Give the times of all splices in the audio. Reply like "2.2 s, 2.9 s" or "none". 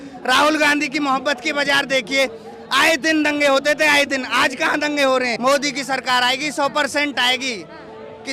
5.3 s